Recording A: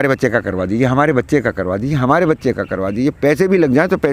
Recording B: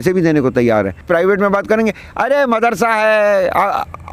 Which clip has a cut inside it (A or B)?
B